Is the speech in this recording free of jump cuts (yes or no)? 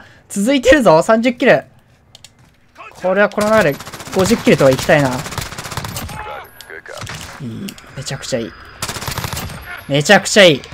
no